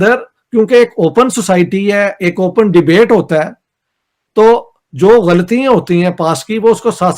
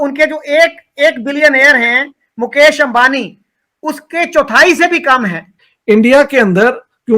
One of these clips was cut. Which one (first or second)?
second